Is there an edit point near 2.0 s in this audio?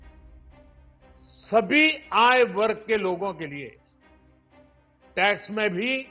no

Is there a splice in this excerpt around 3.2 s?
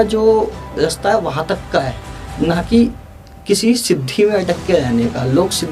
no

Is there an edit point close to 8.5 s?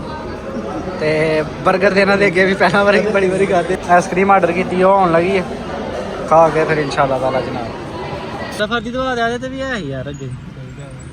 yes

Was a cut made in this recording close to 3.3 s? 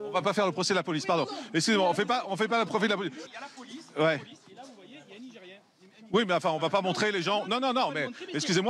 yes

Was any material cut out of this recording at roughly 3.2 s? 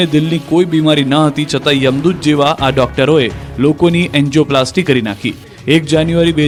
no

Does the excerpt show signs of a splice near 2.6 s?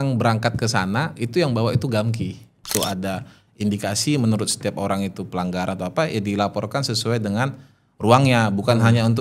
yes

